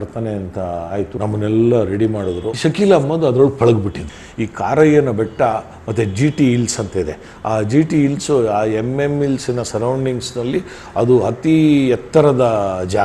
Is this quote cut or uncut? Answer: cut